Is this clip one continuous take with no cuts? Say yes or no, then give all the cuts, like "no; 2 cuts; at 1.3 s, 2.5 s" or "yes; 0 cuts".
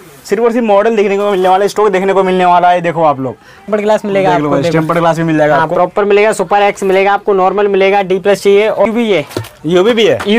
no; 2 cuts; at 3.7 s, 8.9 s